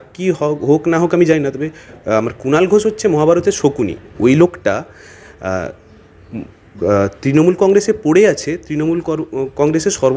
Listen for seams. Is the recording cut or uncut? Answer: uncut